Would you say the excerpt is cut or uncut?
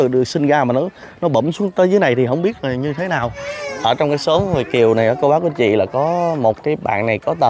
cut